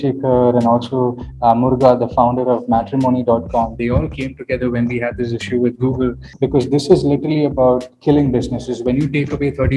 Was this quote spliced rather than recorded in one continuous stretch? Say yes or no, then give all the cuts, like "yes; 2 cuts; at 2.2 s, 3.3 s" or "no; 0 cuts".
yes; 1 cut; at 6.2 s